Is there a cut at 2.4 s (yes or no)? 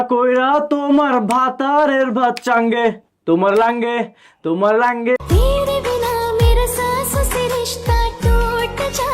no